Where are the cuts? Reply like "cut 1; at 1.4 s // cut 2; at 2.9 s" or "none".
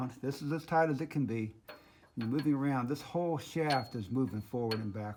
none